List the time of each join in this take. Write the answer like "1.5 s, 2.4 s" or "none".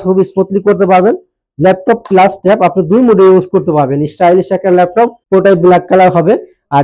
5.2 s